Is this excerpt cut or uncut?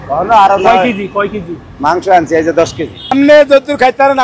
cut